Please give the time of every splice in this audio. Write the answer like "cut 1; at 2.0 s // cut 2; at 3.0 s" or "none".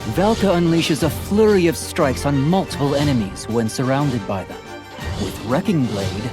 cut 1; at 4.2 s